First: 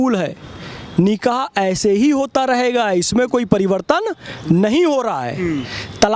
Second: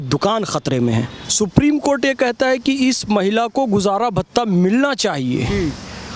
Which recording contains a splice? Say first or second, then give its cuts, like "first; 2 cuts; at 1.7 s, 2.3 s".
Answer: second; 1 cut; at 1.2 s